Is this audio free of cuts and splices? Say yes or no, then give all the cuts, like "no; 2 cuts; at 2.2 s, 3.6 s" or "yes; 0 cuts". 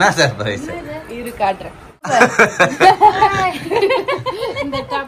no; 1 cut; at 2.1 s